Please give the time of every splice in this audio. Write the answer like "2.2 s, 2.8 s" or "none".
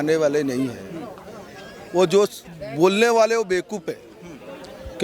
none